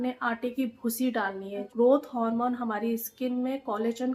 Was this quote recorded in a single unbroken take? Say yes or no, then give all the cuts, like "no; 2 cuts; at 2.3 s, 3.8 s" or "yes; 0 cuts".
no; 1 cut; at 1.7 s